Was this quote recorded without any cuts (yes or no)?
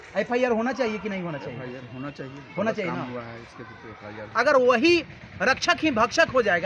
no